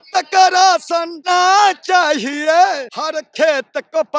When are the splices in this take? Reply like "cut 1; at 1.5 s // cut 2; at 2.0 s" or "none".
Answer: cut 1; at 1.1 s // cut 2; at 2.9 s